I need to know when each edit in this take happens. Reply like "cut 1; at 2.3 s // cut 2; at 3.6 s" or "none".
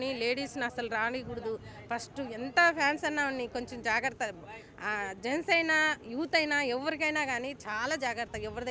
none